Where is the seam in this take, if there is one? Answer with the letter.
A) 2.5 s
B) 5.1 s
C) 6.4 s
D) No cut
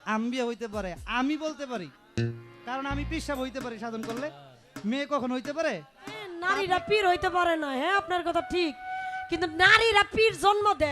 C